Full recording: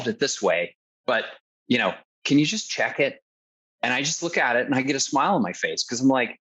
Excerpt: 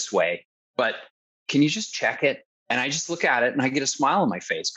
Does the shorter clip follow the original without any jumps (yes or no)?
no